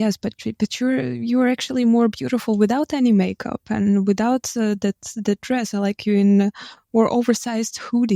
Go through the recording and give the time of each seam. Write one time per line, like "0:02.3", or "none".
none

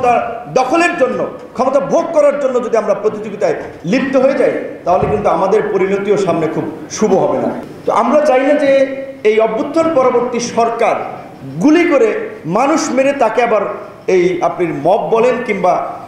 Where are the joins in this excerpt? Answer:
0:07.6

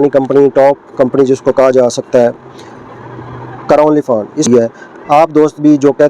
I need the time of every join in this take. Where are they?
0:04.4

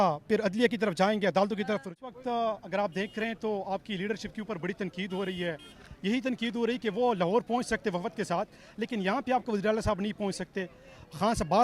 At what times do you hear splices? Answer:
0:01.8

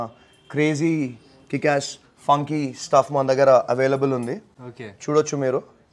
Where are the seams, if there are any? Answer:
none

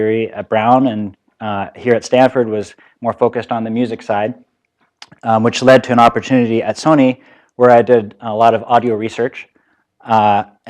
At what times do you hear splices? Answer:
none

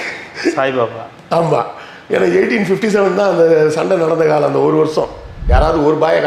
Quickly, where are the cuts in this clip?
0:05.3

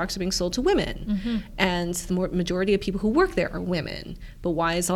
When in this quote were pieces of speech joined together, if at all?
none

